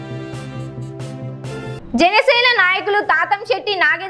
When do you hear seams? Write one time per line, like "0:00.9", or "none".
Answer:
0:01.8